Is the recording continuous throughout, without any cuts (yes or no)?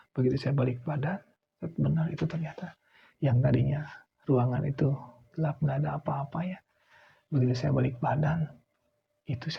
yes